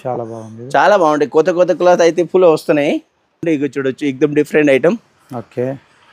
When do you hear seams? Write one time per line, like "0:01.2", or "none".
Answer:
0:03.4